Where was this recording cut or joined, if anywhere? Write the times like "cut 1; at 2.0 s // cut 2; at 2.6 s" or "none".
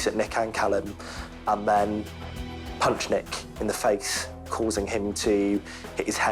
cut 1; at 4.5 s